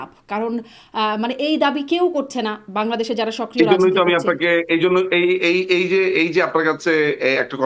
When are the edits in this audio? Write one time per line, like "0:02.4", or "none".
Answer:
none